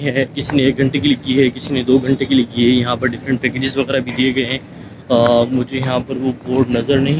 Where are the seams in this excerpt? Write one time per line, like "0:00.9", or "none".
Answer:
none